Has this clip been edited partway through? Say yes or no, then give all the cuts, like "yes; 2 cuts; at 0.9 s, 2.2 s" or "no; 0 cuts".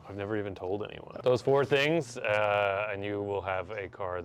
yes; 1 cut; at 1.1 s